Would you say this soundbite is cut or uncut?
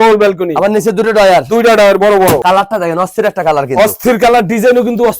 cut